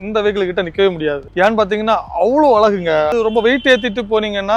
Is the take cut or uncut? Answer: cut